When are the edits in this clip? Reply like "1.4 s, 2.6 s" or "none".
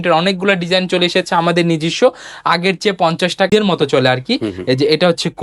3.5 s